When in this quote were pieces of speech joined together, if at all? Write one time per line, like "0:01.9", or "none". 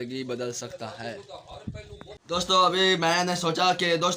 0:02.3